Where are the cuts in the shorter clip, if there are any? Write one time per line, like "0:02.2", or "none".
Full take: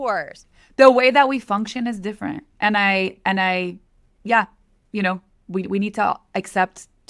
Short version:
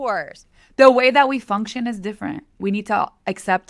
0:02.6